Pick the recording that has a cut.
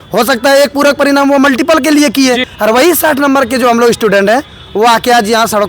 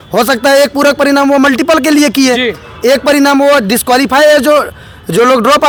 first; 1 cut; at 2.5 s

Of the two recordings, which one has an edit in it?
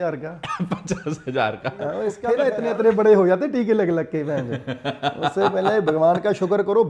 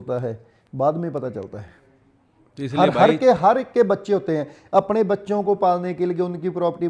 first; 1 cut; at 2.2 s

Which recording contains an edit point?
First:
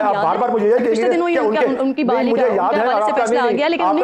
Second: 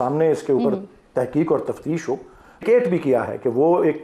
second; 1 cut; at 2.6 s

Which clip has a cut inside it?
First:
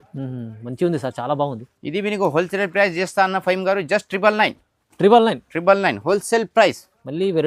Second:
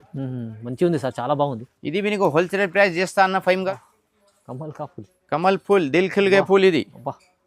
second; 1 cut; at 3.7 s

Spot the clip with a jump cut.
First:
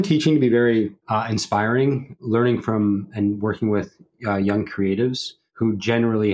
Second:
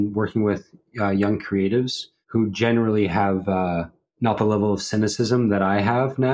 first; 1 cut; at 2.1 s

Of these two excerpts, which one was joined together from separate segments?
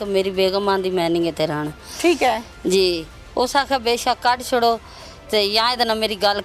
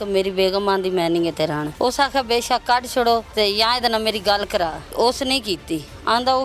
second; 3 cuts; at 1.7 s, 3.3 s, 4.9 s

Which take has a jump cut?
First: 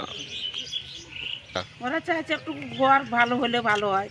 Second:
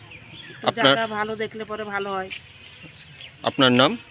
first; 1 cut; at 1.3 s

